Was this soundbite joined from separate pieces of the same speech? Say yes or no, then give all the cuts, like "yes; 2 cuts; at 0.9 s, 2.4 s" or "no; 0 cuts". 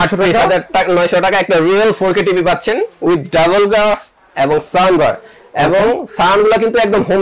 no; 0 cuts